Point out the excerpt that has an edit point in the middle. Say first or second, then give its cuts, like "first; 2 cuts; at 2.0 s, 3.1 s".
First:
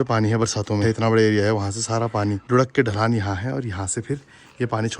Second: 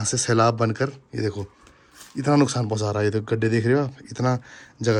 first; 2 cuts; at 0.8 s, 2.4 s